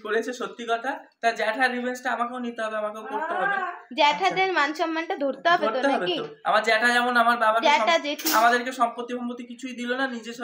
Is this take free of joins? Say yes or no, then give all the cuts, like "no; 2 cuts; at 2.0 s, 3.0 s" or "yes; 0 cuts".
yes; 0 cuts